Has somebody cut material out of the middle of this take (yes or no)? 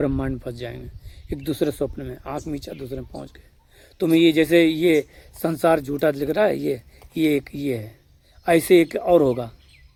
no